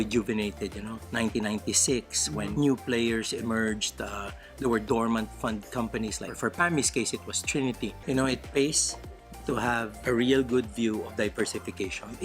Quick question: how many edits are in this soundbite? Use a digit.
1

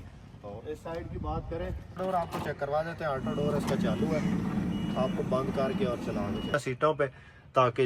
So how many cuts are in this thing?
2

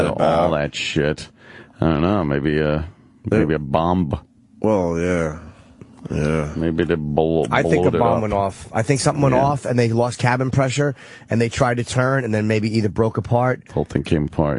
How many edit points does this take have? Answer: 1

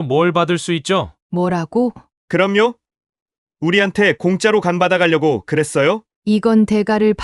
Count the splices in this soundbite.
3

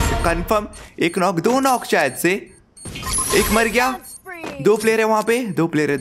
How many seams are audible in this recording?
0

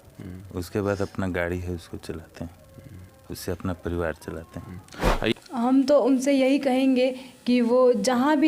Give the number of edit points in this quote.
1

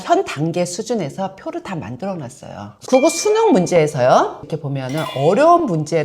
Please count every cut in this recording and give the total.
2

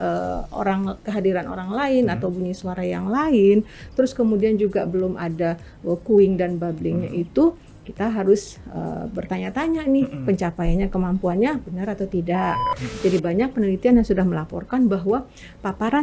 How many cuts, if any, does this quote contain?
1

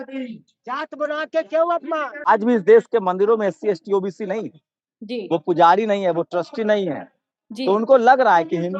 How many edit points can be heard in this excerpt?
1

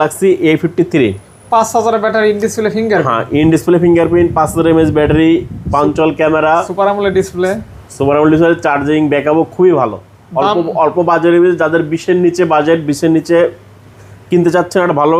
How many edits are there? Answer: 0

